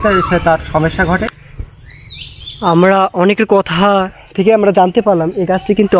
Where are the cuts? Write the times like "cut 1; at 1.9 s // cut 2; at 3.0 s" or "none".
cut 1; at 1.4 s